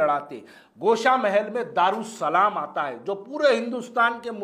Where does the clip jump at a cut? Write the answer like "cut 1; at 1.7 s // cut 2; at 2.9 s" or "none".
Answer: none